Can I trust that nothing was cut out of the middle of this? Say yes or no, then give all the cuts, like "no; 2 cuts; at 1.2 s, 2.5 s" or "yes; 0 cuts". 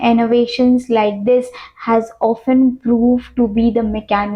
yes; 0 cuts